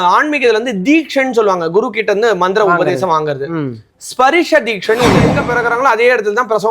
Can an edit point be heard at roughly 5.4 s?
yes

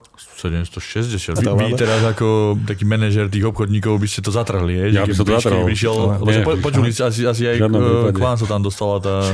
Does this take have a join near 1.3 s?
yes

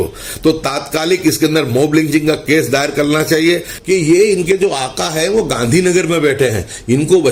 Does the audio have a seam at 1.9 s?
no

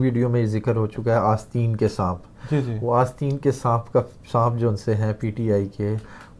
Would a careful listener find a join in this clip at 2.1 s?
no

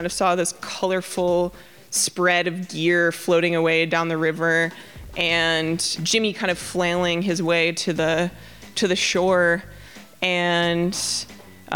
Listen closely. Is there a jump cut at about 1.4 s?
no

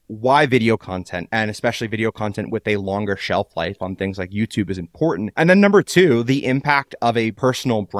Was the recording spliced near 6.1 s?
no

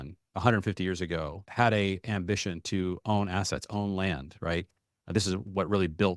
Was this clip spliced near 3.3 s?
no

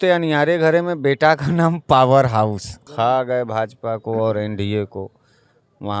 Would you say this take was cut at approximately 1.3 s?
no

